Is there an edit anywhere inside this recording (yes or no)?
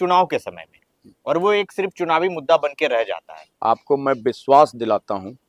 no